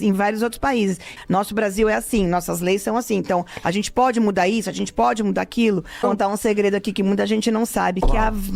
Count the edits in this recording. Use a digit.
2